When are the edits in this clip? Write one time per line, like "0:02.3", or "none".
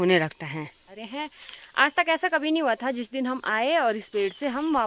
0:01.0